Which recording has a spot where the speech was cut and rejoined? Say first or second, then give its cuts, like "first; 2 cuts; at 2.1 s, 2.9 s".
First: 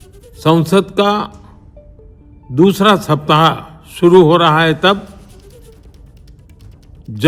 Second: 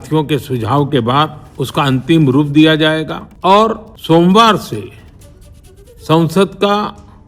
second; 3 cuts; at 1.4 s, 3.2 s, 3.9 s